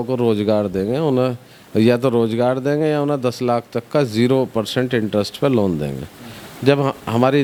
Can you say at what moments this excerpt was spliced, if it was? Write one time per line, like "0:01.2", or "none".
none